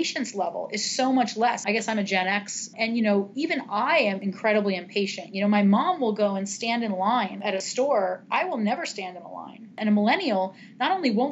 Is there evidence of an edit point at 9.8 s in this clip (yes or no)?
yes